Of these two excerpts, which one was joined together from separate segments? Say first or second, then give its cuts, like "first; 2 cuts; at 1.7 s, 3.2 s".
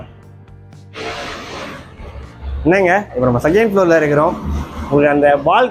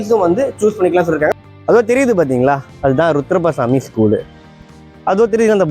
second; 2 cuts; at 1.3 s, 4.6 s